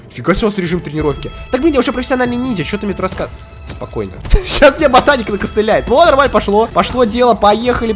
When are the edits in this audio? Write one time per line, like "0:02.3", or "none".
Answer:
0:06.7